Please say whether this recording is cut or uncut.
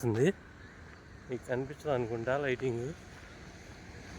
uncut